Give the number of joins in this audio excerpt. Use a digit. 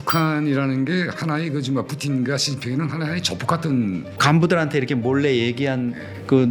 1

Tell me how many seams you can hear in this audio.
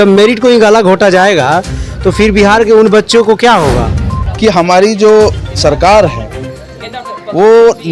1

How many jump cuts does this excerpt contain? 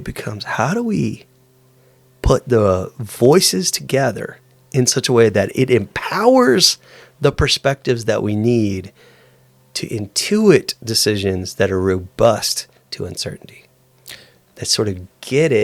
0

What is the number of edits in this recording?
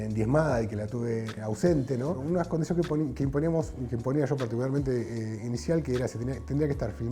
2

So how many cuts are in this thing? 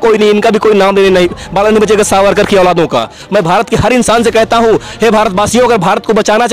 1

